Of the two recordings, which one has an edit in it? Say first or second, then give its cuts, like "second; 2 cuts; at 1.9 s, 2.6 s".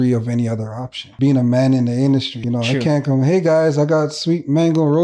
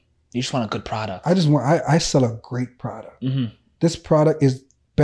first; 2 cuts; at 1.0 s, 2.4 s